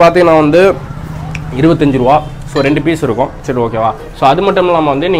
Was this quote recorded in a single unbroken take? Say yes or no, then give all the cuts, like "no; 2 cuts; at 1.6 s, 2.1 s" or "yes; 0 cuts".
yes; 0 cuts